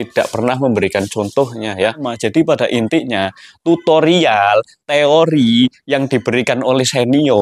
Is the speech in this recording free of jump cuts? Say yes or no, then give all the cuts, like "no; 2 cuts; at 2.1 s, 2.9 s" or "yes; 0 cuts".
no; 1 cut; at 2.1 s